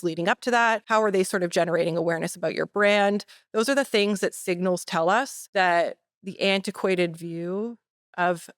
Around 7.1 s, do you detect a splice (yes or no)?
no